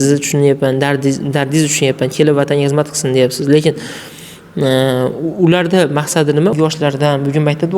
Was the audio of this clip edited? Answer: yes; 1 cut; at 6.5 s

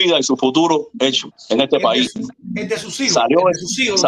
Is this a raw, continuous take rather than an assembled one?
yes; 0 cuts

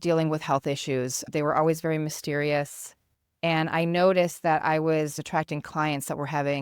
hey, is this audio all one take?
no; 2 cuts; at 1.2 s, 5.2 s

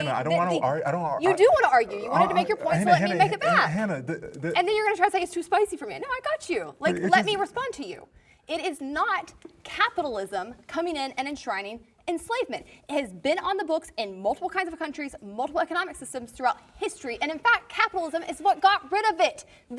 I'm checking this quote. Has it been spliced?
no; 0 cuts

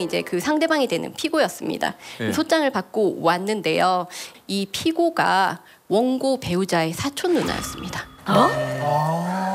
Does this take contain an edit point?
no; 0 cuts

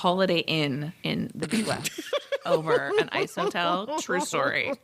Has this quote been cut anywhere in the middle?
yes; 1 cut; at 0.9 s

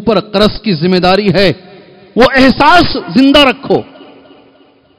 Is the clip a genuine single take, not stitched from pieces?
yes; 0 cuts

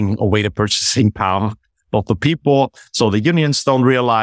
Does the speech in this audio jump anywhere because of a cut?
no; 0 cuts

